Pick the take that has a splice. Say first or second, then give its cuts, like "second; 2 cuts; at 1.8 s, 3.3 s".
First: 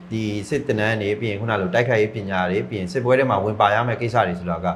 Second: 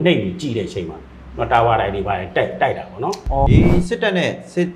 second; 1 cut; at 3.5 s